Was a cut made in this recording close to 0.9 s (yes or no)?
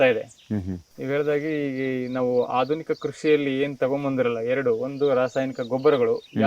no